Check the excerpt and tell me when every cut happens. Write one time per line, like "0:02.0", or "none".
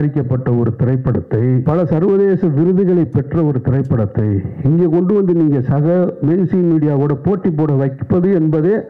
0:01.6